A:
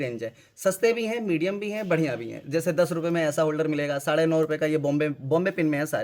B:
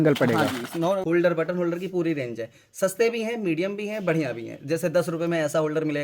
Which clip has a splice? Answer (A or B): B